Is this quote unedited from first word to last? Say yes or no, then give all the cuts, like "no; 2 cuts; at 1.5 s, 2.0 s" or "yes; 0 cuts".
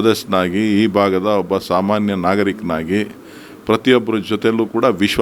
yes; 0 cuts